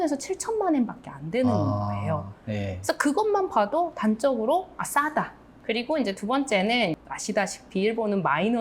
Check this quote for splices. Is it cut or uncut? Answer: cut